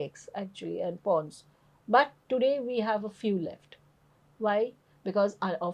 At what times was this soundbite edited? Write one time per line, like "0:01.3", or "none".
none